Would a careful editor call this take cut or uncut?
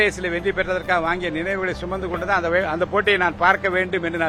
uncut